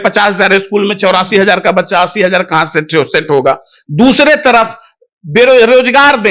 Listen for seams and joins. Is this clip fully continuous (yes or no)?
yes